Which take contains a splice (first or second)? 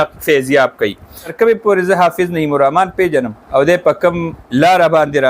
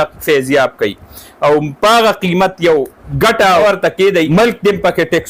first